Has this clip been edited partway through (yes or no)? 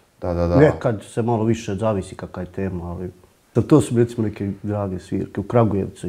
yes